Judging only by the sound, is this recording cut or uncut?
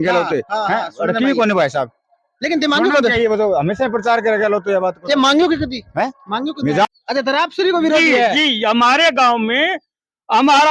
cut